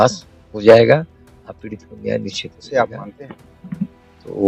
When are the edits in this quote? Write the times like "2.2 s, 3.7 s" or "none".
2.5 s